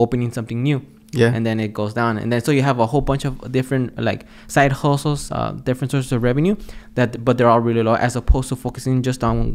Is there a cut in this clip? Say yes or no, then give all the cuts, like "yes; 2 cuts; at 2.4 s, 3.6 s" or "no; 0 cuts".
no; 0 cuts